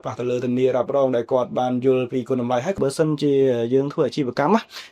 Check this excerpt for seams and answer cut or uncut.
cut